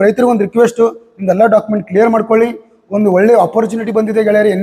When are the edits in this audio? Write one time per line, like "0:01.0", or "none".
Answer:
none